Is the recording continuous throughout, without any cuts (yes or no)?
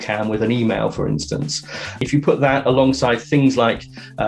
no